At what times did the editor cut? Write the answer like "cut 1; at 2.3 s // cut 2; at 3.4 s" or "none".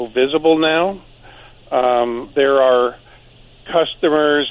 none